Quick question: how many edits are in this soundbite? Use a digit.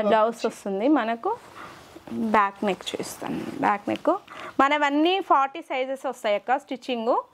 0